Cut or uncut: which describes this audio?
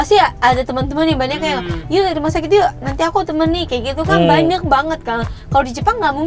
uncut